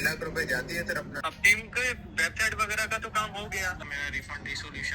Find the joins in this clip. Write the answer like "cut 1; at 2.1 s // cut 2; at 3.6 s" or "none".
cut 1; at 1.2 s // cut 2; at 3.8 s

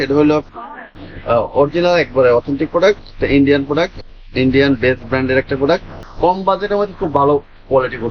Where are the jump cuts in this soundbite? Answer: cut 1; at 1.0 s // cut 2; at 6.0 s

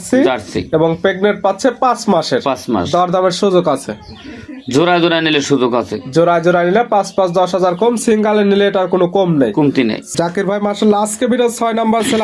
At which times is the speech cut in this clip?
none

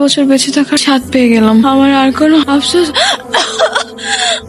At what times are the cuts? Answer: none

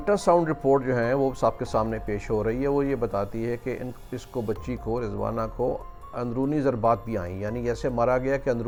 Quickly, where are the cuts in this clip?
none

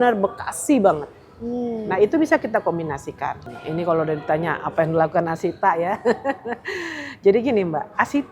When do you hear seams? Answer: cut 1; at 3.4 s

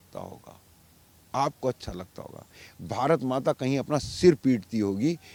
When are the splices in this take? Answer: none

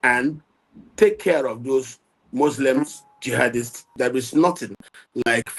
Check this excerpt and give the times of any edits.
cut 1; at 3.9 s

